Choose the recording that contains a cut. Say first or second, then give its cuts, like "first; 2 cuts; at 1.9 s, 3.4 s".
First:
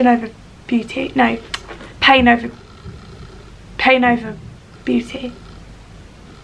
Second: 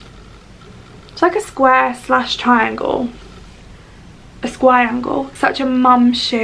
second; 1 cut; at 5.3 s